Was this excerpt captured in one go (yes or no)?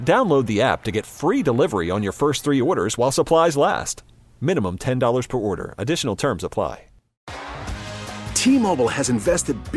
no